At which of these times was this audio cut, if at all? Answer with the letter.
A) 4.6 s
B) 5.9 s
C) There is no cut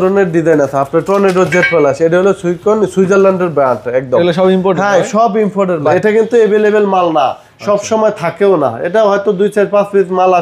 B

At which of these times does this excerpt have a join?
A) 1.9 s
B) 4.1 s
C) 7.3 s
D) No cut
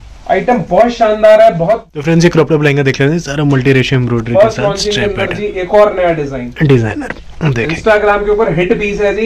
A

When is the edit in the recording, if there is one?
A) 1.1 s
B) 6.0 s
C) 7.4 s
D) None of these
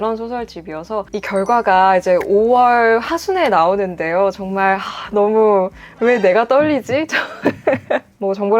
A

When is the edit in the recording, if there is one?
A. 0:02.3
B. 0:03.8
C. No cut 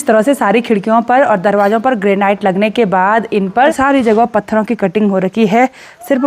B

